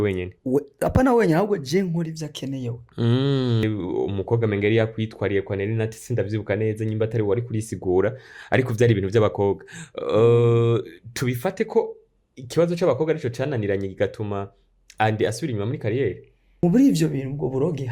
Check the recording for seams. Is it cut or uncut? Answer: cut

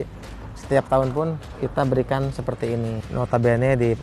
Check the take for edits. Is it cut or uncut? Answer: cut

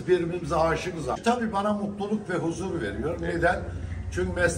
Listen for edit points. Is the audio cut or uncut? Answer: cut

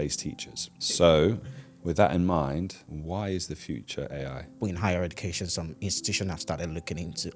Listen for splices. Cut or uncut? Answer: cut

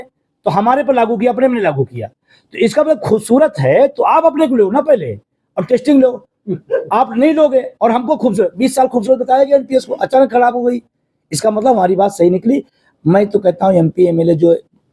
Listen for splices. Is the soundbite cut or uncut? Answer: uncut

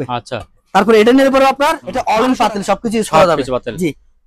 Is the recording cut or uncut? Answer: cut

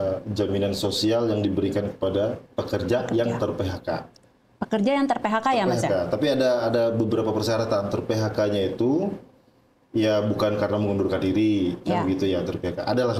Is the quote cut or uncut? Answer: uncut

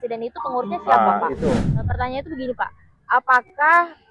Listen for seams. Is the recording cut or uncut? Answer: cut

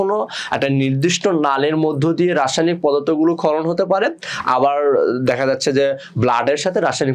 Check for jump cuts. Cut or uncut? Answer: uncut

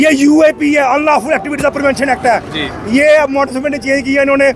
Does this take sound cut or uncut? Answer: uncut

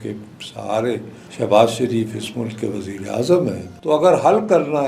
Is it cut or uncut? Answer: cut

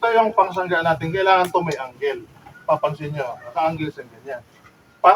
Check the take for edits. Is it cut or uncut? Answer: uncut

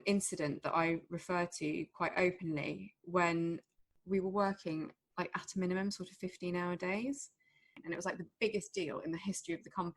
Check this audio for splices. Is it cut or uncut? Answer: cut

